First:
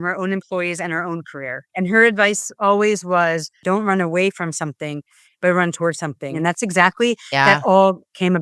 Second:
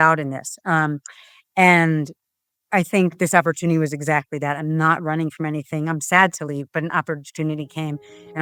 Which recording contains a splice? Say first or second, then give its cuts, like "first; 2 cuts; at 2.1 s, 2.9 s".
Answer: first; 3 cuts; at 1.6 s, 3.6 s, 6.3 s